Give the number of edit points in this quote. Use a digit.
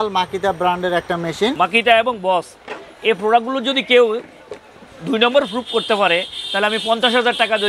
1